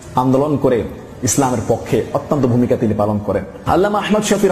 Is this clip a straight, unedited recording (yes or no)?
yes